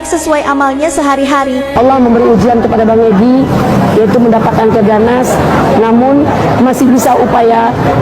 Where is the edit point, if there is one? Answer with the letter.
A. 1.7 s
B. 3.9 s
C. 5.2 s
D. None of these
A